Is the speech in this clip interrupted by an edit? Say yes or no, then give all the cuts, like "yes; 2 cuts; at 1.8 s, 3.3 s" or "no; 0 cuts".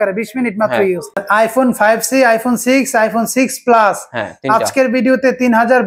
yes; 1 cut; at 1.2 s